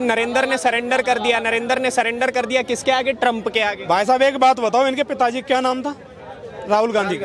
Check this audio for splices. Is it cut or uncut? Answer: uncut